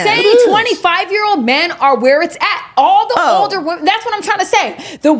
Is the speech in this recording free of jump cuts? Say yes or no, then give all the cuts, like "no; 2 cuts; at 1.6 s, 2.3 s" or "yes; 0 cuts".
yes; 0 cuts